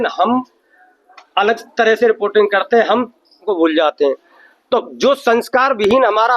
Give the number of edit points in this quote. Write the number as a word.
one